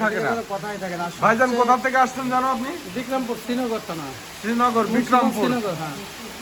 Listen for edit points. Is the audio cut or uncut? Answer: uncut